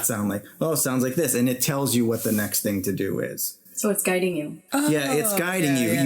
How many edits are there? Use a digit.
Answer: 1